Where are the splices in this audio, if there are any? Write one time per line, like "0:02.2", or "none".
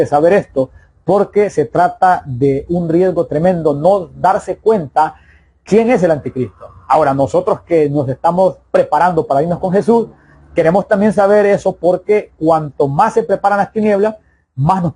none